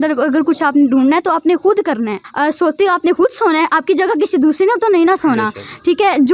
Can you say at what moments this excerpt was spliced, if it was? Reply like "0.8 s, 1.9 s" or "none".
2.2 s